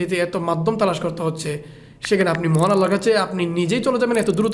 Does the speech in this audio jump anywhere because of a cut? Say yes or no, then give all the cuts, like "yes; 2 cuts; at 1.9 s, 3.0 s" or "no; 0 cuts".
no; 0 cuts